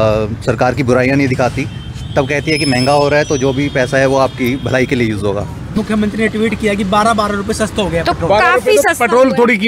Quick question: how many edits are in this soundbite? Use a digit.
1